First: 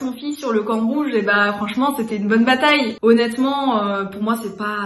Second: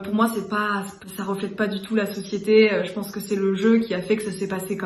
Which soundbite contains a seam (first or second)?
first